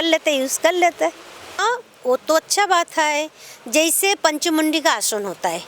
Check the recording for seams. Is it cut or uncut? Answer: cut